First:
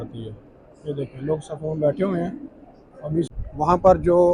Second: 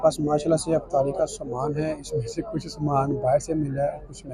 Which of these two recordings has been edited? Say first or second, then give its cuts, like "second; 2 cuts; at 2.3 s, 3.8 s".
first; 1 cut; at 3.3 s